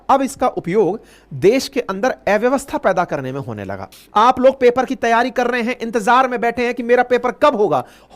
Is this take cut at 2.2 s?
no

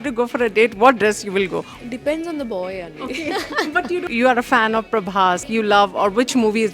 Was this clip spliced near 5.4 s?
yes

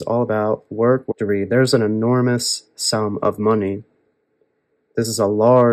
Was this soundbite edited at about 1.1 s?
yes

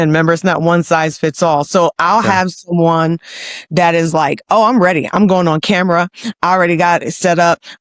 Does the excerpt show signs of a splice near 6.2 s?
no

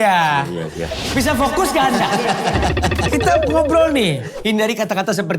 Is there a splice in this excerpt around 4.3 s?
yes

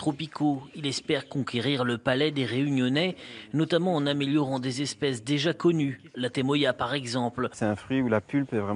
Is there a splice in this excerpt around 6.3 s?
no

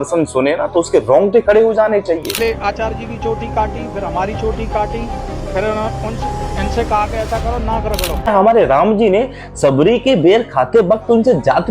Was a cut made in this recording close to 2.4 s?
yes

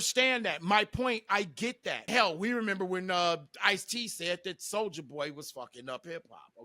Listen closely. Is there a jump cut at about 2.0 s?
yes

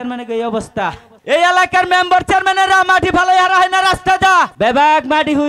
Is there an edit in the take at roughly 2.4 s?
no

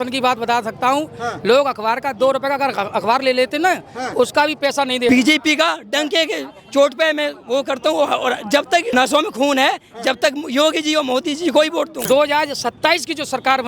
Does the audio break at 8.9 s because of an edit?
yes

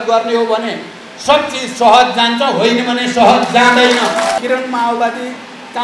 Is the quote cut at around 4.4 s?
yes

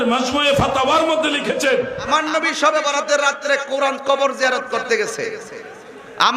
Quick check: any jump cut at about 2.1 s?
yes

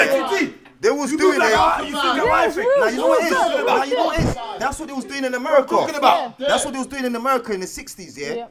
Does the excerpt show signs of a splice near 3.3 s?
no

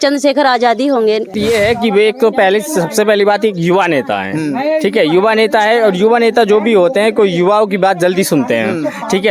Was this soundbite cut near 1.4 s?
yes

